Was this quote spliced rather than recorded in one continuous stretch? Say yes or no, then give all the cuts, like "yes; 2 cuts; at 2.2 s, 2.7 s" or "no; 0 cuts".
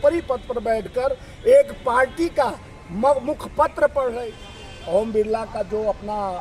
yes; 1 cut; at 4.2 s